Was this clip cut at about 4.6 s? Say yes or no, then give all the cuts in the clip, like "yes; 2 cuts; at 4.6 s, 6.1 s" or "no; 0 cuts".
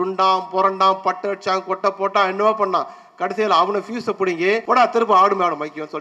yes; 1 cut; at 4.6 s